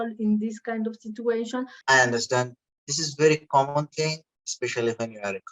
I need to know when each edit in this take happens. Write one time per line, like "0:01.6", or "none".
0:01.8